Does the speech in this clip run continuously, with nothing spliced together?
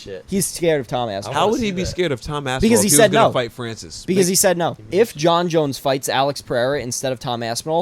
no; 1 cut; at 4.8 s

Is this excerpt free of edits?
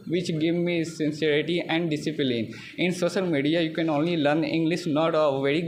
yes; 0 cuts

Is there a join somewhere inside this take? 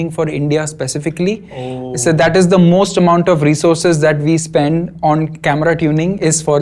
no; 0 cuts

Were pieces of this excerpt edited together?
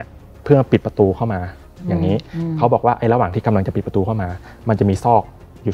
no; 0 cuts

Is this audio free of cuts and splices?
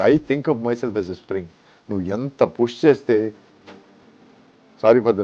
yes; 0 cuts

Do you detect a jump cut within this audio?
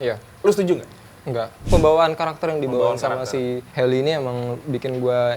yes; 1 cut; at 1.6 s

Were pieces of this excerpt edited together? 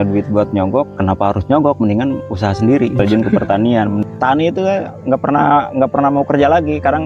yes; 3 cuts; at 0.9 s, 2.9 s, 4.0 s

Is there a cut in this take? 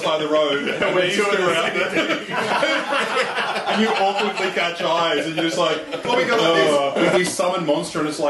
yes; 1 cut; at 7.2 s

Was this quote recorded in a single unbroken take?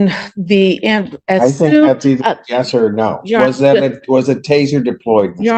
yes; 0 cuts

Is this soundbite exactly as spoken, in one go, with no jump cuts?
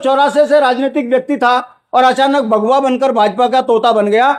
yes; 0 cuts

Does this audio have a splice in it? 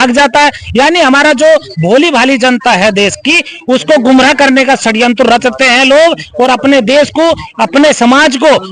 no; 0 cuts

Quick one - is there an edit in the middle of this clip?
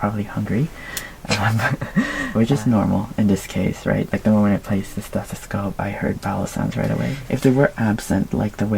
yes; 2 cuts; at 2.2 s, 7.2 s

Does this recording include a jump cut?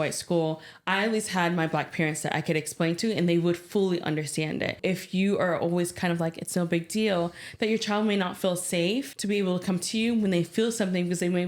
yes; 2 cuts; at 4.8 s, 9.1 s

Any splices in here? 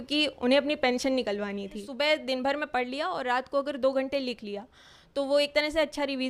yes; 1 cut; at 1.8 s

